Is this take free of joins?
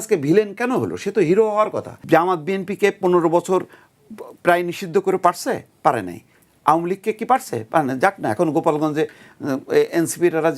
no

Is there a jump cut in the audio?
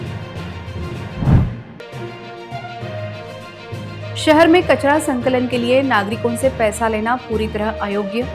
yes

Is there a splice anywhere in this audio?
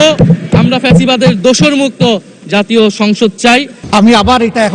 yes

